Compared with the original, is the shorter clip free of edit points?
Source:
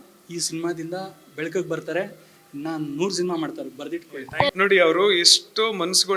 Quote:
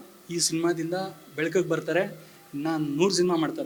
yes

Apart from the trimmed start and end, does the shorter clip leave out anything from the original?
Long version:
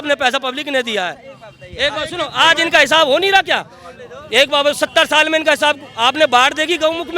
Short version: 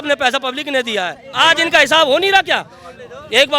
yes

